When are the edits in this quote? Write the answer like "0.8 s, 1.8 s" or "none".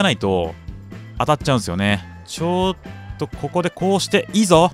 2.2 s